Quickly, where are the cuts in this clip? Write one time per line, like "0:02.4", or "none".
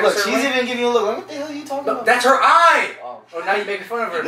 none

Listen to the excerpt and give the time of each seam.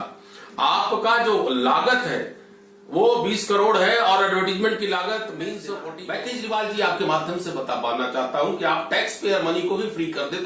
0:05.7

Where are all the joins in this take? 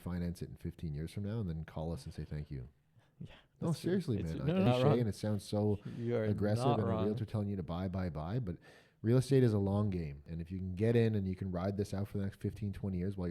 0:04.7
0:10.3

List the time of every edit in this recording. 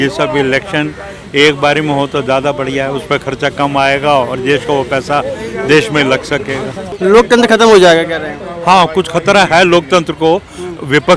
0:06.9

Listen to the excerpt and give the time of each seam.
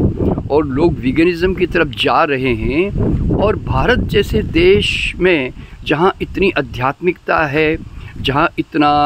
none

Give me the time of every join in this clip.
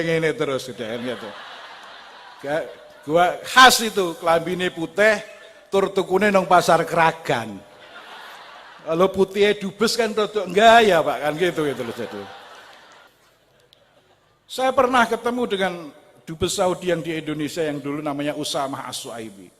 0:13.0

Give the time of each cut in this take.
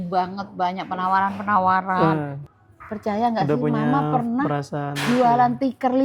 0:02.4

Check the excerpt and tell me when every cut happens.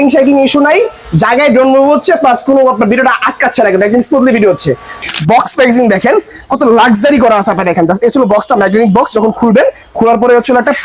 0:05.0

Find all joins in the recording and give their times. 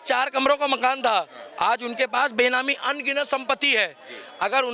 none

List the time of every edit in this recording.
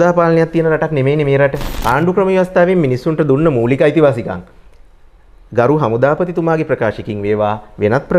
0:01.7

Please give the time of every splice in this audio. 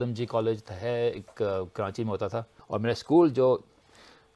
0:02.6

